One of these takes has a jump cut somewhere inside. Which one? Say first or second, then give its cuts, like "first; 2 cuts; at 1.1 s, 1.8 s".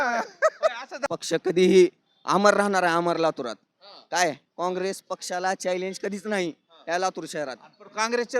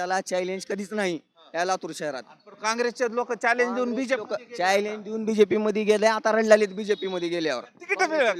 first; 1 cut; at 1.0 s